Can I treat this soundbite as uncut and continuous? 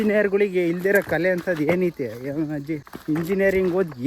no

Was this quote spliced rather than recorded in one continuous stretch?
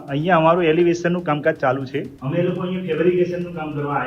yes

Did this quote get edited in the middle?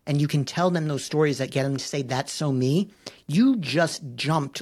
no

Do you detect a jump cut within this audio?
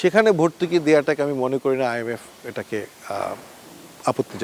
no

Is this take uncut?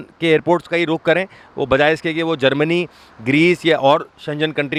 yes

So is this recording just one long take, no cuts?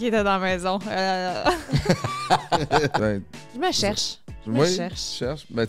no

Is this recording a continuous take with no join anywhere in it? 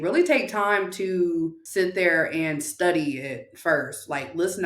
no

